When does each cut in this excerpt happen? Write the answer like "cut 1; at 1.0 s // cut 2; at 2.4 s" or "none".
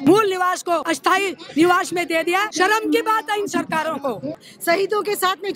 cut 1; at 0.9 s // cut 2; at 2.5 s // cut 3; at 4.4 s

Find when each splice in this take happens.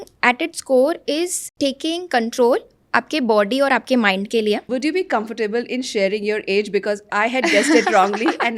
cut 1; at 1.4 s // cut 2; at 4.6 s

